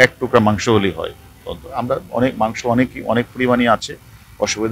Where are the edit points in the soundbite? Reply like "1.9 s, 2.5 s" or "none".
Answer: none